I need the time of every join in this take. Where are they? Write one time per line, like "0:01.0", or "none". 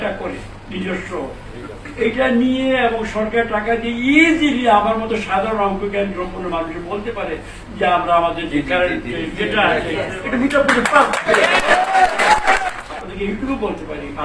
0:12.8